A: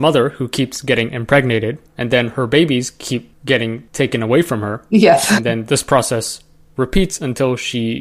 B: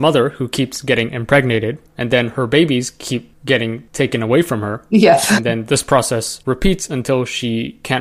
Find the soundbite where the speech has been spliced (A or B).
B